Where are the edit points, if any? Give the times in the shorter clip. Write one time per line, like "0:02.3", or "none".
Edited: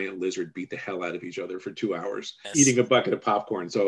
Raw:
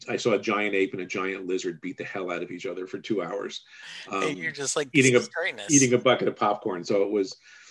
0:02.4